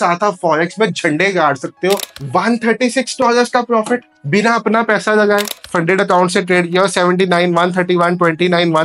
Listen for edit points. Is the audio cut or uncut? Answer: cut